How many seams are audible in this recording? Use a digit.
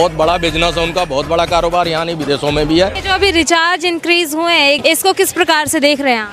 2